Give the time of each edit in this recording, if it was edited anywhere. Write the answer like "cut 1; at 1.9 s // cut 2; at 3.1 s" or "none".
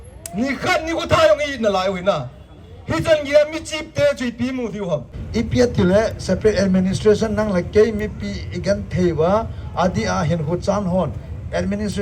cut 1; at 5.2 s